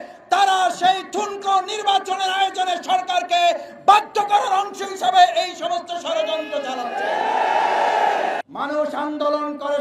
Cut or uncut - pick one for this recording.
cut